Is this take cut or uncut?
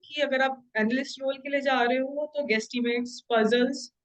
uncut